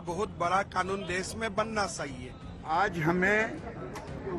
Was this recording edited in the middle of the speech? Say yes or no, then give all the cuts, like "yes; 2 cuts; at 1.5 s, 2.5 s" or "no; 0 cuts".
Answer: yes; 1 cut; at 2.6 s